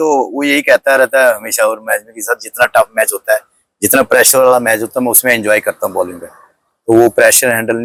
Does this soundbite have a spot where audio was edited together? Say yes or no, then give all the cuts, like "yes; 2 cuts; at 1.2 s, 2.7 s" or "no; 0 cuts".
no; 0 cuts